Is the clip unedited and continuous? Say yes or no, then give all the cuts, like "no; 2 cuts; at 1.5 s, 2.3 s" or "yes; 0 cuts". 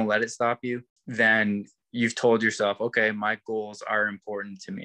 no; 1 cut; at 1.0 s